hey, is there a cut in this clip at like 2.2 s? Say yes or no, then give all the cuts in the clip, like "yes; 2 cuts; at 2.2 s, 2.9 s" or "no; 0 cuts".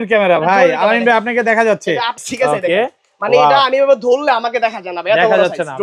yes; 1 cut; at 2.2 s